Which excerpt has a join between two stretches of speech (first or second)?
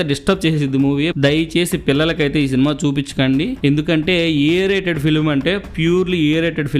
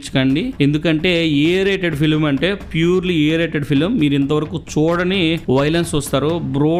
first